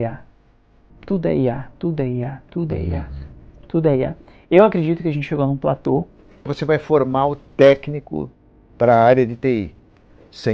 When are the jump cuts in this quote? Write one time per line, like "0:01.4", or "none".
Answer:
0:06.5